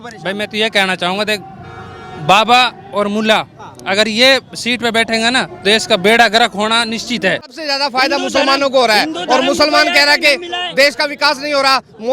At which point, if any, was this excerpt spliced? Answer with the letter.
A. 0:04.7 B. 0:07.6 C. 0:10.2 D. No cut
B